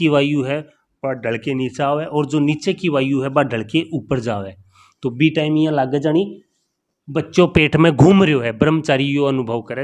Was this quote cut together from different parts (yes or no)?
no